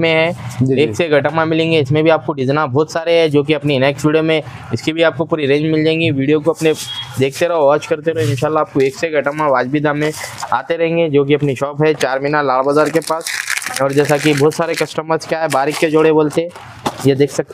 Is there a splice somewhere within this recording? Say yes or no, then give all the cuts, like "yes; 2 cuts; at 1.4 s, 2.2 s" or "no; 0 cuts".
no; 0 cuts